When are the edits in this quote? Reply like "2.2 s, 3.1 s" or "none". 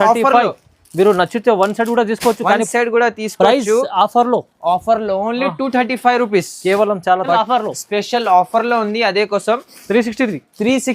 7.3 s